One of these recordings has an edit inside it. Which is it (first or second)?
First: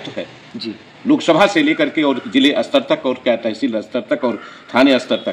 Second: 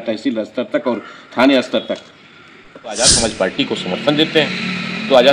second